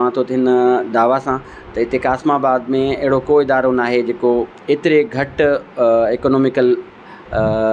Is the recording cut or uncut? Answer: uncut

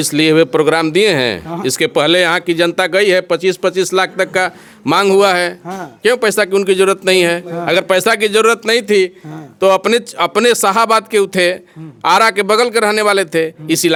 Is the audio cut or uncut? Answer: uncut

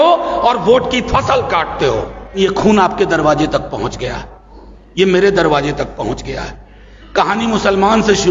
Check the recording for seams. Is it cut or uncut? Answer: cut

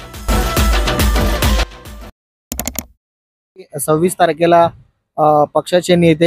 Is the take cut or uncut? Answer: cut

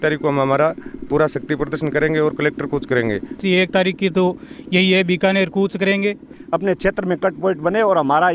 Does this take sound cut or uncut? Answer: cut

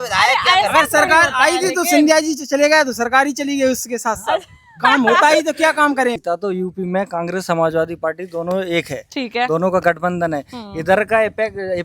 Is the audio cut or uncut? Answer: cut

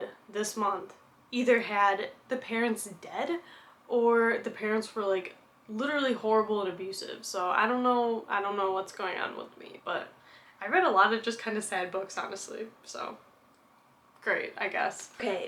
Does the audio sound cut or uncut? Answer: uncut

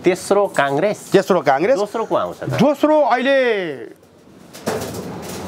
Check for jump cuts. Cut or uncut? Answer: uncut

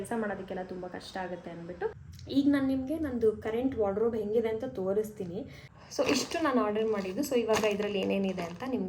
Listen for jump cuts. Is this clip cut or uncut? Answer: cut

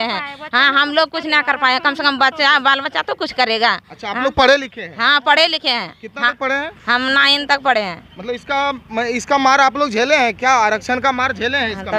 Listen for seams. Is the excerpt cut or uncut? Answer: uncut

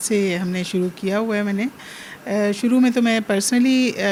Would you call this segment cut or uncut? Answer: uncut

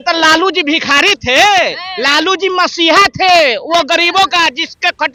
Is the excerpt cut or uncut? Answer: uncut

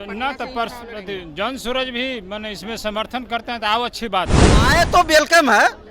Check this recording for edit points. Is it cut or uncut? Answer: cut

